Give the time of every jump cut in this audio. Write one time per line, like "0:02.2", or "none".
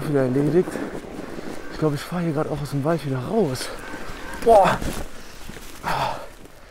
none